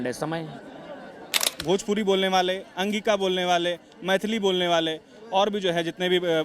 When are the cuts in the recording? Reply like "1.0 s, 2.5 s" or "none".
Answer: 1.5 s